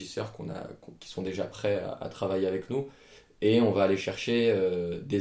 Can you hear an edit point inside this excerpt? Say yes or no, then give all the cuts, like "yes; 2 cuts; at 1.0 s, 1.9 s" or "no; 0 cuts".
no; 0 cuts